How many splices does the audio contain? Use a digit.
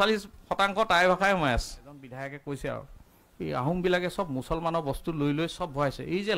1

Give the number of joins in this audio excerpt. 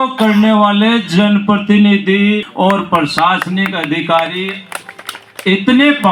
0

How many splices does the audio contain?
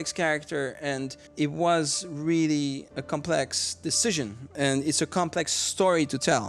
3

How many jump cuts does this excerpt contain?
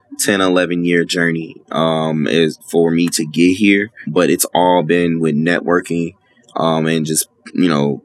1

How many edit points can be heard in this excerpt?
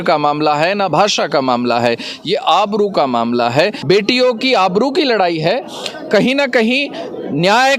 1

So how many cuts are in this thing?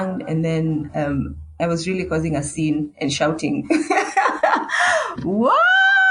0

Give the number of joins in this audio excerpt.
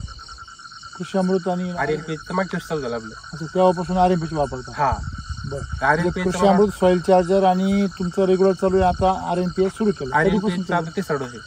0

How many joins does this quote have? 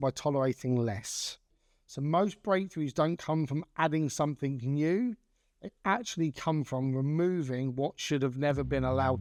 0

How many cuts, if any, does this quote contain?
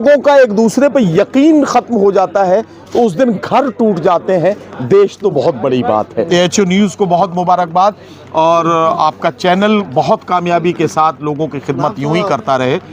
1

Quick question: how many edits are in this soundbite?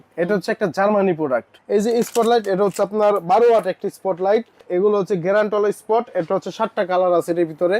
2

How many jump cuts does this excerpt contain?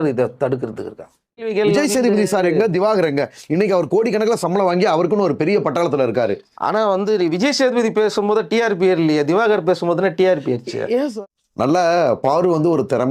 2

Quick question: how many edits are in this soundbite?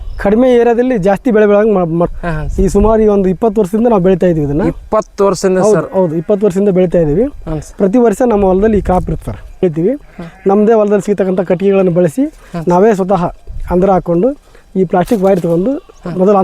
2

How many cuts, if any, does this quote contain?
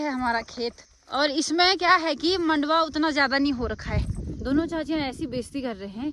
2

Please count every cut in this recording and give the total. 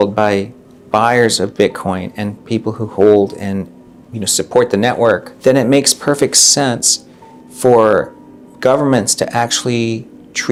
0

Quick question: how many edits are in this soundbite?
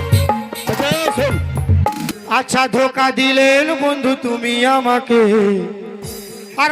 1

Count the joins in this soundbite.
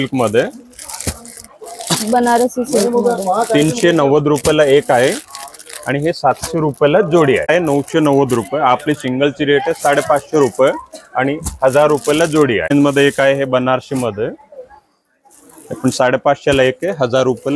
2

